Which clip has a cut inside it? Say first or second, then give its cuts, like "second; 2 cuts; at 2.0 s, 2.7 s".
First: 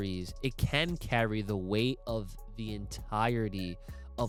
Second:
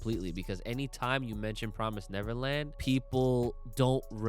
second; 1 cut; at 2.7 s